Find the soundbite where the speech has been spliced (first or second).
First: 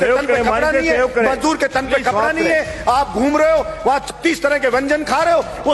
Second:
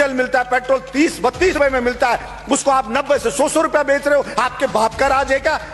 second